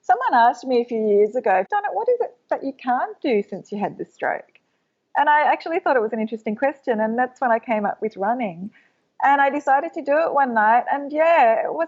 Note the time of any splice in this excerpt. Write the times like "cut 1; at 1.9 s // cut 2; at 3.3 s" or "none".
cut 1; at 1.7 s